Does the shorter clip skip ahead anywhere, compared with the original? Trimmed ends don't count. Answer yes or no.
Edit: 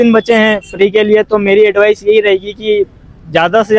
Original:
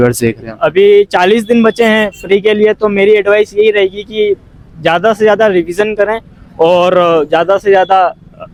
no